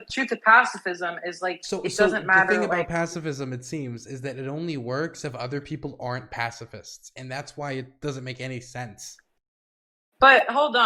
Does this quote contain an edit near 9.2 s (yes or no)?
no